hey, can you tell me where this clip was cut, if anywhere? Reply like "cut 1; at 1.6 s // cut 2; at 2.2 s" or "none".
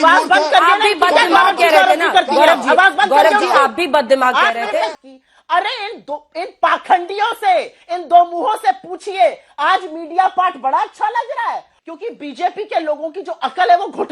cut 1; at 4.9 s // cut 2; at 11.7 s